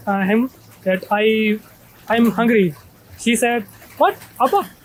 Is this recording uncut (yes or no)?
yes